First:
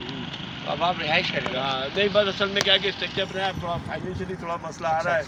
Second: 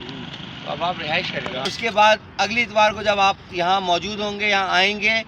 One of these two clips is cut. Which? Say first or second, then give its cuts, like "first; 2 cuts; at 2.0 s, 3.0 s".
second; 1 cut; at 1.7 s